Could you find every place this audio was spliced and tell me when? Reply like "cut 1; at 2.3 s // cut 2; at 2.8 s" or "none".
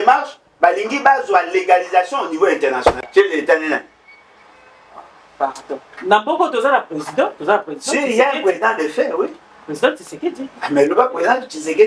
cut 1; at 2.9 s